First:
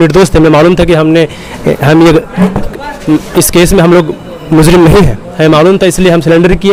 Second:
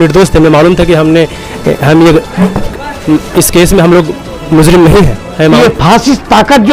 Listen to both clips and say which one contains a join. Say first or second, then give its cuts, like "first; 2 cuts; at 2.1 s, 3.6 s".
second; 1 cut; at 5.6 s